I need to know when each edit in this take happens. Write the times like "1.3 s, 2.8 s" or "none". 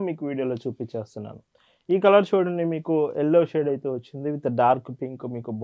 none